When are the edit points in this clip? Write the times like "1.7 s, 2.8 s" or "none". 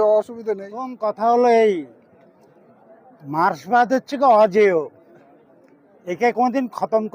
0.9 s